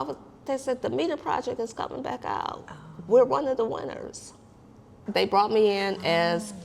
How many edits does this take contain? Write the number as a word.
one